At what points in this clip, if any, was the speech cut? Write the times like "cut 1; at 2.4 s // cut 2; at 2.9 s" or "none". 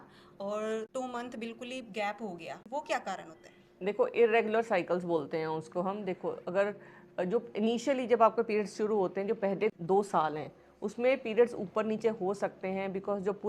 cut 1; at 0.9 s // cut 2; at 2.7 s // cut 3; at 9.7 s